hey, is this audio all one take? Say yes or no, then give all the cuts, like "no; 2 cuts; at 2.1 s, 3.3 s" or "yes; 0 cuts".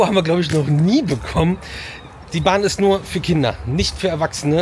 yes; 0 cuts